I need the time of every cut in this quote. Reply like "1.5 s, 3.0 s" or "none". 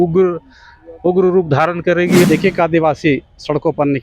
2.2 s